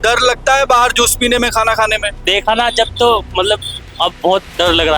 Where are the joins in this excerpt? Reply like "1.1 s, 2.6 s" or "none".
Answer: 2.1 s